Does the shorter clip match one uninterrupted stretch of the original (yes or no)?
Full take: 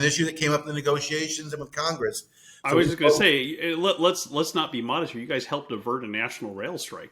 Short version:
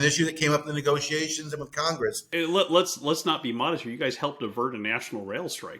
no